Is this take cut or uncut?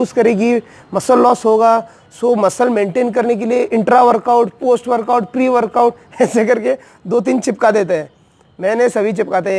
uncut